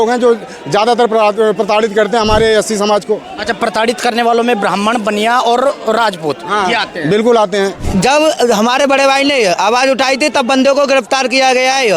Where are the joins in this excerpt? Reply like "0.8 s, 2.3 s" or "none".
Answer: 7.8 s